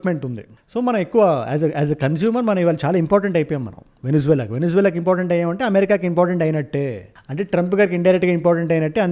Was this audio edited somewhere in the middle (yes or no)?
no